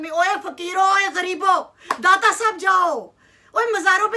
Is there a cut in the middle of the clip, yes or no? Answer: no